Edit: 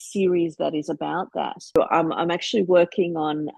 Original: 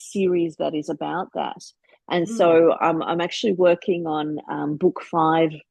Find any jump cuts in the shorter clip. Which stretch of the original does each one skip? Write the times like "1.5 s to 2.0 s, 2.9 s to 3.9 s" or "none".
1.8 s to 2.7 s